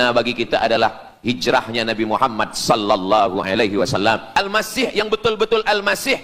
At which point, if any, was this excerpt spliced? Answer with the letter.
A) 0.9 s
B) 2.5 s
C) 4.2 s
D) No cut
C